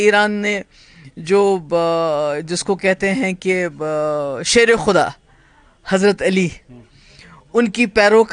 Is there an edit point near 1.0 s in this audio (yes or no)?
no